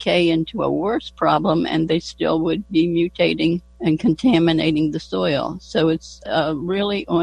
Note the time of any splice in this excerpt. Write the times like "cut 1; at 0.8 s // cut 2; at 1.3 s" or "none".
cut 1; at 3.7 s // cut 2; at 6.2 s